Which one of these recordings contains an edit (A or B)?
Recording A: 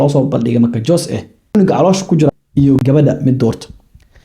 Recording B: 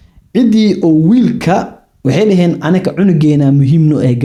A